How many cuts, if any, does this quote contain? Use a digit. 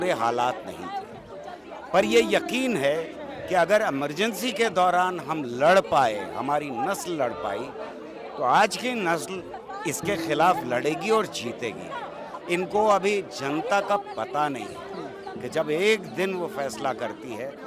1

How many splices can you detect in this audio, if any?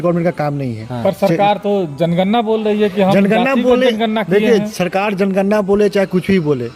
0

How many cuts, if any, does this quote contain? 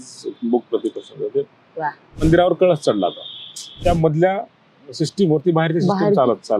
2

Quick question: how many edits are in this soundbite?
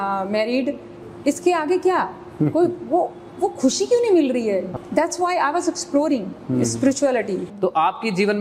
3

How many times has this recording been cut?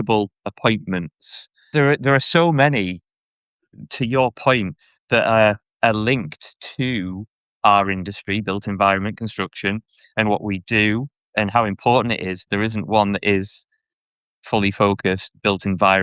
2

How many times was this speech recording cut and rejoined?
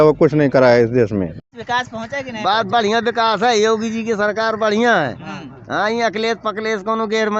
1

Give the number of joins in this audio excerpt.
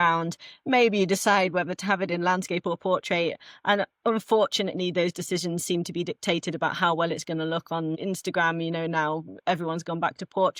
0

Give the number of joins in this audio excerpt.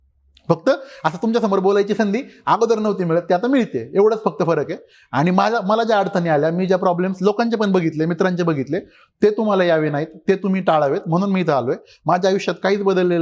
0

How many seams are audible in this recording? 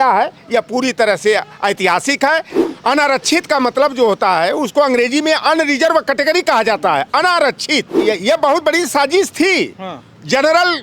2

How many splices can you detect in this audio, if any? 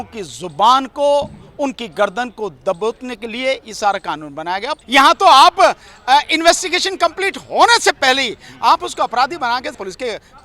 1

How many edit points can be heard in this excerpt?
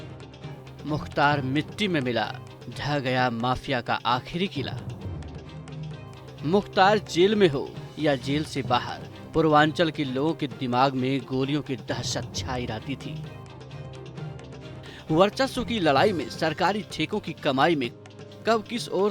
0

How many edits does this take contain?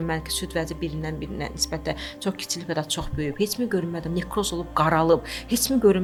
0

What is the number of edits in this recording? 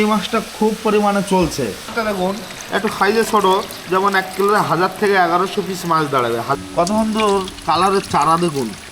2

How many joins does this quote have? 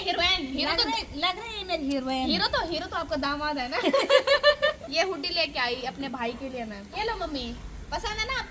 2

